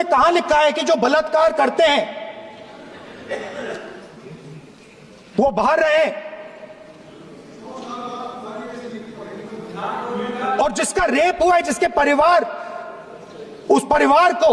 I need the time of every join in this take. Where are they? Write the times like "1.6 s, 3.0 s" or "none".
none